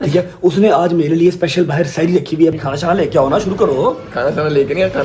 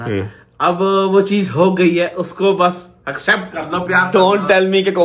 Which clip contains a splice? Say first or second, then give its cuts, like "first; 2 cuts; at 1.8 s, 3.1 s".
first; 1 cut; at 2.6 s